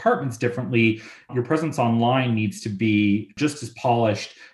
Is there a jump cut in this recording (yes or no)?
yes